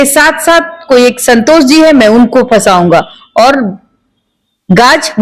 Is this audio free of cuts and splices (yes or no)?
yes